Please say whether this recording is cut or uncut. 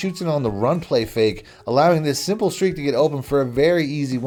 uncut